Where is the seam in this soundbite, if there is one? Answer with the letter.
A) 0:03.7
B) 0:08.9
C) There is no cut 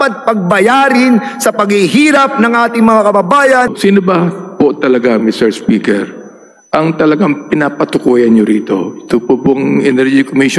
A